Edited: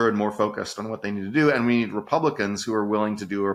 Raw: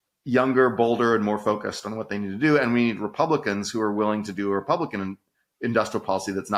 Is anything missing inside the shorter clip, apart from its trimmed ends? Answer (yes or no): no